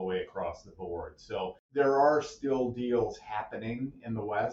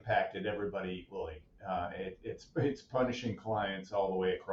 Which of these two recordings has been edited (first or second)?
first